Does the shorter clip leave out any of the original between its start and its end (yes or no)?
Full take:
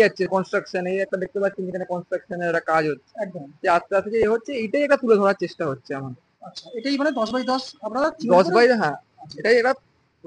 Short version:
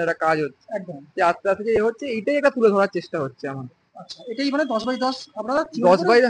no